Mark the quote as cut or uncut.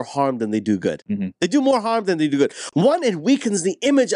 uncut